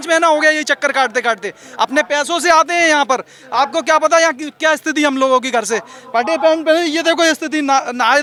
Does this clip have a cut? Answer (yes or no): no